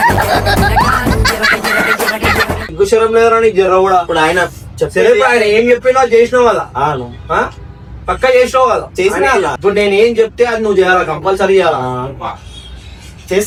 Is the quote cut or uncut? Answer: uncut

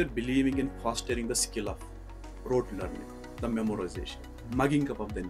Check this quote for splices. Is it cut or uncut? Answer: uncut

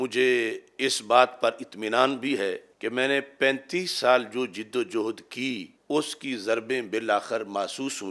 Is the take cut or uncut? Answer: cut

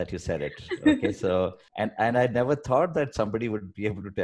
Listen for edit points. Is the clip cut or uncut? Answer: cut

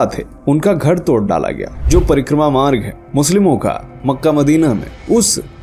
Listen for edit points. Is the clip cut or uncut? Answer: cut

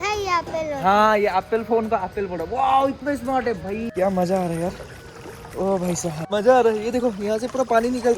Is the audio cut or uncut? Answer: cut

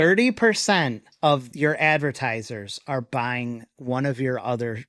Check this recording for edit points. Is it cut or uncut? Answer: cut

